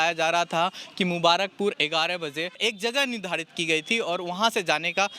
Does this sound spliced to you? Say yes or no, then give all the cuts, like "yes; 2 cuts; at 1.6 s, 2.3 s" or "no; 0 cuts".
yes; 1 cut; at 2.6 s